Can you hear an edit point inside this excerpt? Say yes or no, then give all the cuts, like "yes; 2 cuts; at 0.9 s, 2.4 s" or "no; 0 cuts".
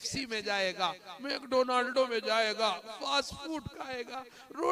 no; 0 cuts